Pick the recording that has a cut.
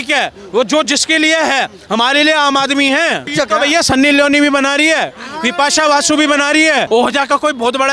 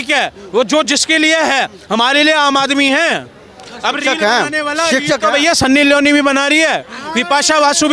first; 2 cuts; at 3.3 s, 6.9 s

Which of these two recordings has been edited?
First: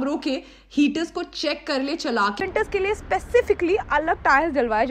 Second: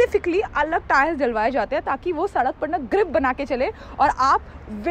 first; 1 cut; at 2.4 s

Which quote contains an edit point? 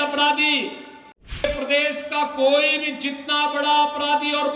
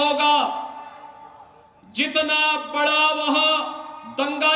first; 1 cut; at 1.4 s

